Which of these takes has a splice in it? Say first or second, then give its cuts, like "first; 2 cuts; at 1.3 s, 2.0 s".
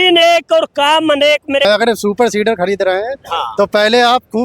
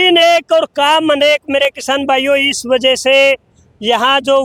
first; 1 cut; at 1.7 s